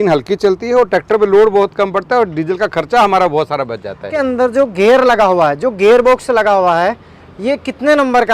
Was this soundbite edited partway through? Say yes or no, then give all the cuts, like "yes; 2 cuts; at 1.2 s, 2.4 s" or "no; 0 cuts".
yes; 1 cut; at 4.1 s